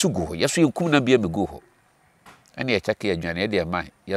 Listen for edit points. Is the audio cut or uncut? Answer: uncut